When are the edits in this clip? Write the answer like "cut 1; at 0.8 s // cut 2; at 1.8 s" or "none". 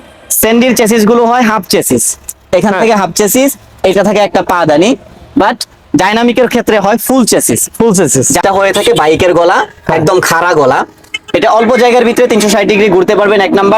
cut 1; at 8.4 s